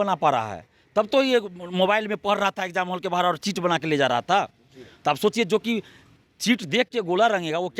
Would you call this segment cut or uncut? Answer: uncut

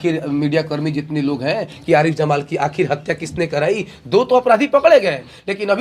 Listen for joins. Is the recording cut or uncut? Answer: uncut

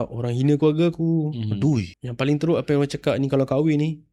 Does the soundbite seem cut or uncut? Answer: cut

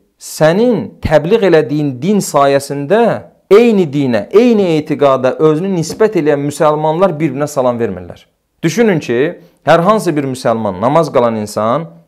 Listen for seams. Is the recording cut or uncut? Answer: uncut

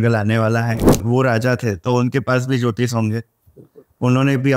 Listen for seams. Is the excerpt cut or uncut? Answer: cut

